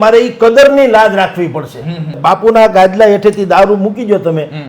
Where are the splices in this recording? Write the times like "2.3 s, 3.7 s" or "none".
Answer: 2.1 s